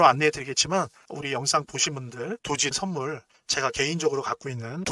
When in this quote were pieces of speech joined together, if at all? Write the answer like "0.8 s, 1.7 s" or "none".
1.0 s, 2.7 s